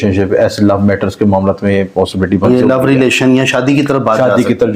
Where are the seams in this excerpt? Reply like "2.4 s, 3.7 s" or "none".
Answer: 2.5 s

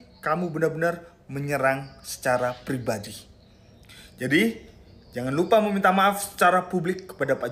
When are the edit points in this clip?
none

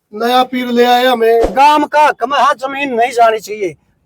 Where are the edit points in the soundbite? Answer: 1.5 s

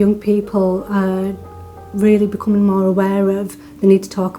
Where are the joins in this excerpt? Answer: none

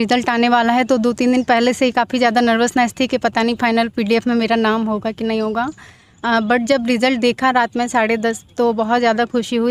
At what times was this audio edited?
none

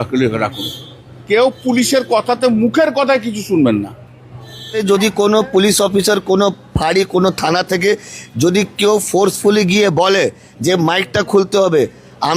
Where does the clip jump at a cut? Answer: 1.1 s, 4.8 s

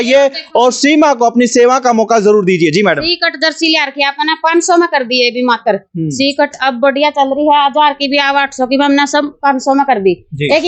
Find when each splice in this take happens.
none

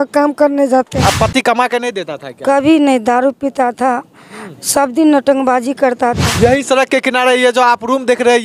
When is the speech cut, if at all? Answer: 1.0 s, 6.3 s

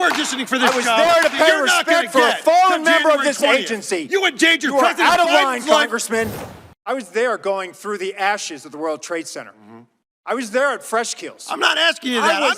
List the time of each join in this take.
6.3 s

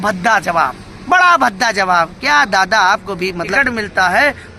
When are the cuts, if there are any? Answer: 3.4 s

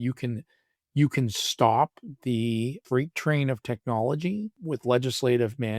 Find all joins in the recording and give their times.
2.8 s, 4.6 s

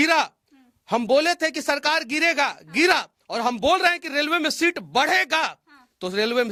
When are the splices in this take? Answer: none

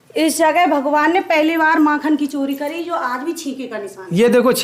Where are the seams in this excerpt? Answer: none

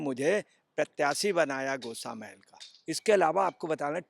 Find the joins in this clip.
2.7 s

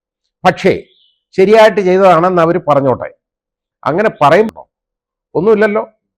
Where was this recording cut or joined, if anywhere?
4.5 s

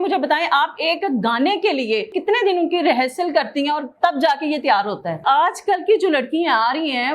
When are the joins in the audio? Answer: 2.1 s, 5.2 s

